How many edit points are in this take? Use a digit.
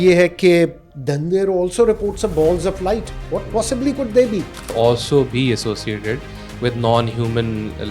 2